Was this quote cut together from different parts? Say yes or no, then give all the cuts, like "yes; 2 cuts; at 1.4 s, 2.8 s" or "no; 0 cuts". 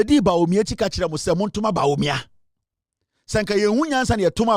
no; 0 cuts